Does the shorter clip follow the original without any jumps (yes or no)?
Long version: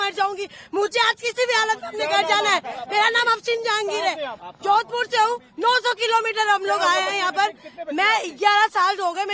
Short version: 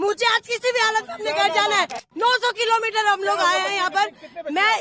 no